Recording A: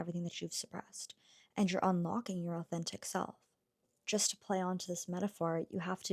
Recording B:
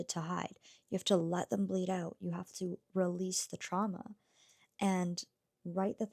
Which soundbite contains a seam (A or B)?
A